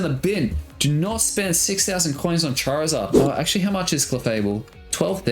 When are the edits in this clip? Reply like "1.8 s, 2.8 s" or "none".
3.1 s